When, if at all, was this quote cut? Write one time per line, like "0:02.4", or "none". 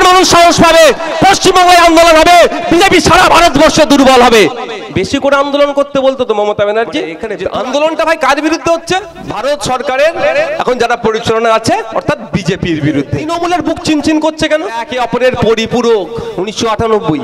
0:07.2
0:09.2
0:13.3
0:14.9
0:16.2